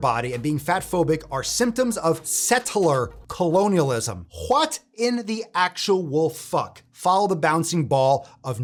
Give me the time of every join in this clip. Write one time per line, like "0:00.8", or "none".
none